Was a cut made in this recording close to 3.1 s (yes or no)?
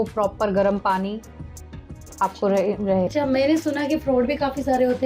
yes